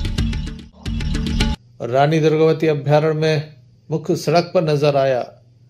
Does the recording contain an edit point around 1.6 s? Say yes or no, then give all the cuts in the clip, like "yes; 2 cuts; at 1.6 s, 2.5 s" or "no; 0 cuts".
yes; 1 cut; at 1.6 s